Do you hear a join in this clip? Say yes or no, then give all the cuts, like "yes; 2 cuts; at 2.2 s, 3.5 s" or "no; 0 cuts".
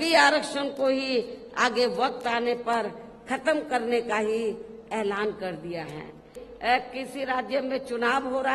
yes; 1 cut; at 6.4 s